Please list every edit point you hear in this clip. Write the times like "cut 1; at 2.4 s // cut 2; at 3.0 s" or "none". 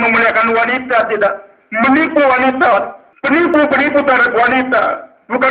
cut 1; at 3.4 s